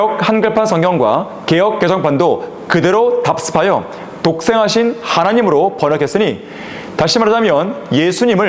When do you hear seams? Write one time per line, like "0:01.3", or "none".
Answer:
none